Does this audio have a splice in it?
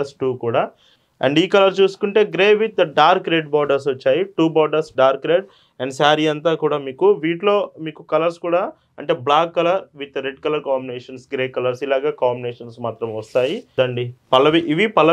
yes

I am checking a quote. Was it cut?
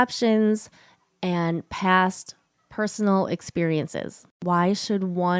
yes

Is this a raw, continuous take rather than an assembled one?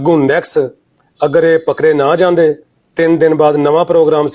yes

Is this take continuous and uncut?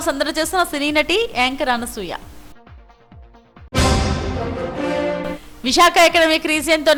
yes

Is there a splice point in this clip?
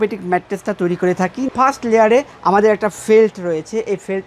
yes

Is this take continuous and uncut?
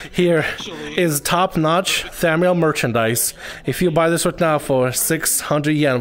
yes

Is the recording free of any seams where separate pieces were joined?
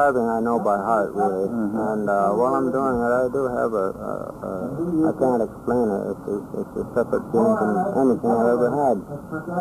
yes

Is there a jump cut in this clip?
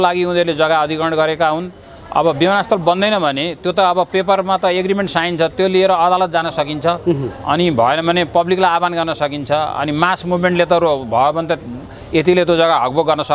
no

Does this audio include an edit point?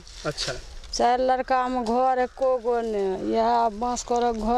no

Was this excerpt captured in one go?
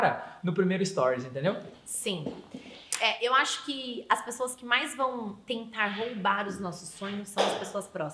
yes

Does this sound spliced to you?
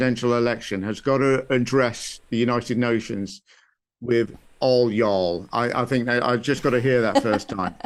no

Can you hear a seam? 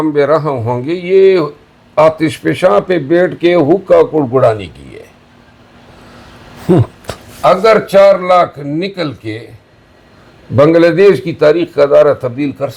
no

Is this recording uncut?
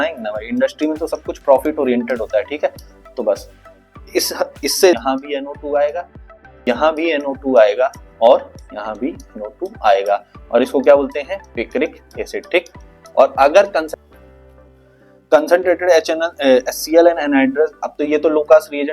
no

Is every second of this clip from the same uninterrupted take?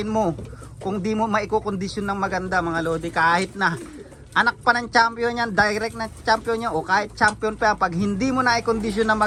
yes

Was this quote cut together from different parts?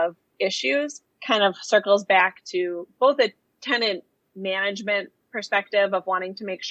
yes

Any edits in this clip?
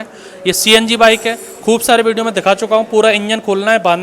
no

